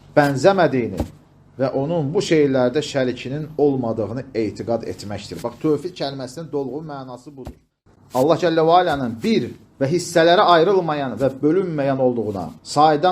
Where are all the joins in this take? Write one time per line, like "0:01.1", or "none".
0:07.9